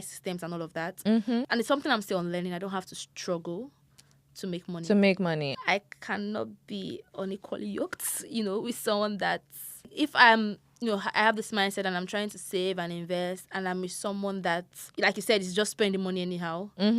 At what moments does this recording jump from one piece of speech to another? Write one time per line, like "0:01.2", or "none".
0:01.4
0:05.6
0:09.8
0:14.8